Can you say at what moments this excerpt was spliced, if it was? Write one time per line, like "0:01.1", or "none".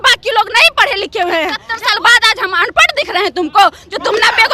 0:01.7